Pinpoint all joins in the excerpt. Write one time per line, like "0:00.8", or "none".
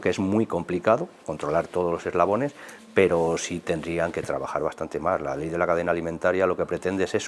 none